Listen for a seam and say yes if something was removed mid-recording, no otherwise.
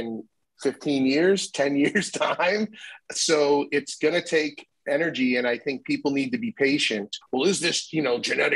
yes